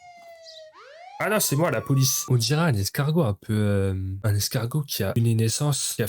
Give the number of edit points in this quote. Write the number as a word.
one